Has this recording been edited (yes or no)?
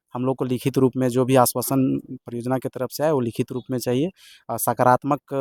no